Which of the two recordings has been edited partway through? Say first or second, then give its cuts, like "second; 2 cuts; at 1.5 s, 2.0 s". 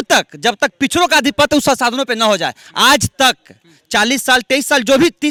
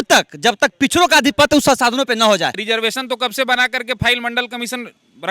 second; 1 cut; at 2.6 s